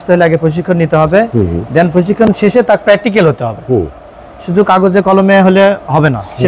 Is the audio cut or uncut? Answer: uncut